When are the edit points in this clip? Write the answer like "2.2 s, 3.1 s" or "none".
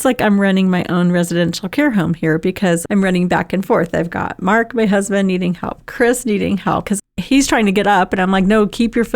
2.8 s, 6.8 s